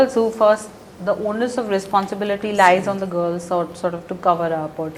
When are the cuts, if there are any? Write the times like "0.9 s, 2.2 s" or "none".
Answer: none